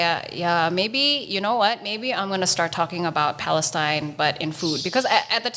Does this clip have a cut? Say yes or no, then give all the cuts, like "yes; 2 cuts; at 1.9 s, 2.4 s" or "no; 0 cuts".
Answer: no; 0 cuts